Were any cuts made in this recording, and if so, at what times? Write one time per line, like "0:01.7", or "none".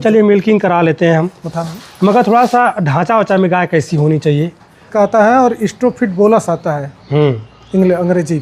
0:04.9